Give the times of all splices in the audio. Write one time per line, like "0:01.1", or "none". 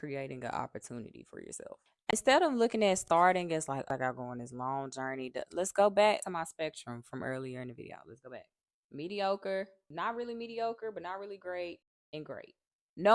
0:02.1